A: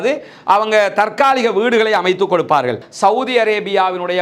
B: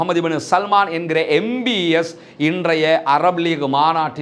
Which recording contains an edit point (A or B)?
A